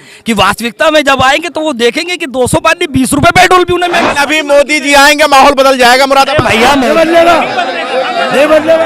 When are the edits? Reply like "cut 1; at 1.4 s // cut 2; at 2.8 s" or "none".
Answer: cut 1; at 4.1 s // cut 2; at 6.8 s